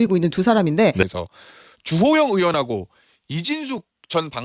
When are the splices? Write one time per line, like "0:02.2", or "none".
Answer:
0:01.0